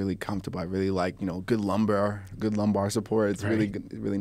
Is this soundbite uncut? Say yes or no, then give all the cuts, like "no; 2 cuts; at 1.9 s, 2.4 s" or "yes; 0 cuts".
yes; 0 cuts